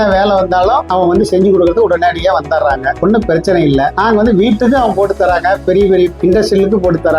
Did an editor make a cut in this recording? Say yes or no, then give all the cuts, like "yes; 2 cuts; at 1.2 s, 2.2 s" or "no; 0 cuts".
no; 0 cuts